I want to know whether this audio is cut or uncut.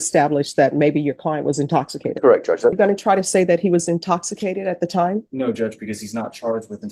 cut